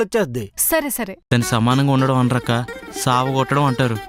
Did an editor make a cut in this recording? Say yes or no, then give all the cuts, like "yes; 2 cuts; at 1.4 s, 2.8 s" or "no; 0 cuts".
yes; 1 cut; at 1.1 s